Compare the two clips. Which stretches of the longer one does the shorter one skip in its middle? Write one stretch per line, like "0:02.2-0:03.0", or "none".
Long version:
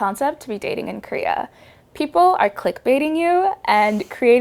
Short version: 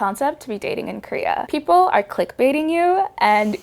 0:01.5-0:01.9